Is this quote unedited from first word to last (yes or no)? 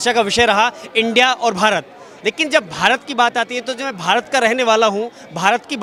yes